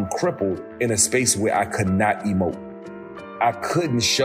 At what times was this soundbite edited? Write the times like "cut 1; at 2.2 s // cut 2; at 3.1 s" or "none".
cut 1; at 2.9 s